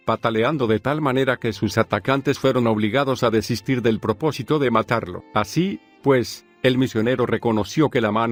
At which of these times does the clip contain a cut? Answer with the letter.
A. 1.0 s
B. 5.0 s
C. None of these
C